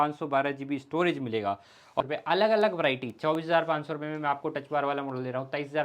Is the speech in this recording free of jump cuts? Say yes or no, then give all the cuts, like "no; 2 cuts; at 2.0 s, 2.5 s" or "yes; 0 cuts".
no; 1 cut; at 2.0 s